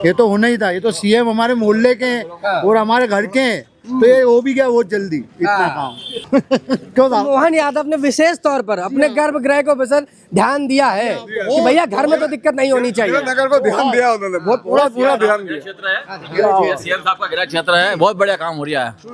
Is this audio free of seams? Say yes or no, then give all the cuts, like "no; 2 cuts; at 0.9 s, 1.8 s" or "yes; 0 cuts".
yes; 0 cuts